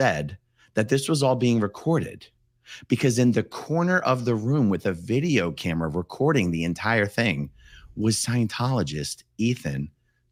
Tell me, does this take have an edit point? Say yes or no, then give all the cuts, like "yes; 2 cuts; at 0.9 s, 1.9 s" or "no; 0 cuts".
no; 0 cuts